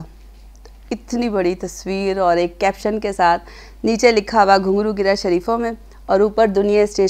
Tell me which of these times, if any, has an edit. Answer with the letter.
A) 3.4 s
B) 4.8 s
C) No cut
C